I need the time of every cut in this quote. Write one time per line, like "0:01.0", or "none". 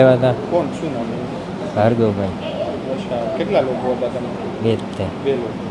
none